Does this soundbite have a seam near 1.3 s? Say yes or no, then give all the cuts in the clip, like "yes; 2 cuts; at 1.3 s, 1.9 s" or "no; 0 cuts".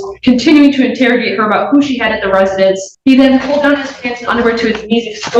no; 1 cut; at 2.9 s